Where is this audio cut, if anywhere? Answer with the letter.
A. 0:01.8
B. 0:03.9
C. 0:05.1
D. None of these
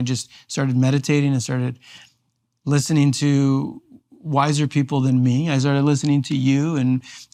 D